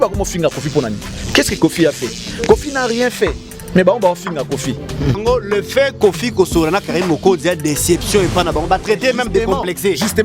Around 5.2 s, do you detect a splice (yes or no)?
yes